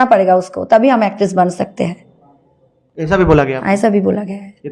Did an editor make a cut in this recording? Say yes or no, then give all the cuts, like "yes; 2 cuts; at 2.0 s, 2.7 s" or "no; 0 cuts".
no; 0 cuts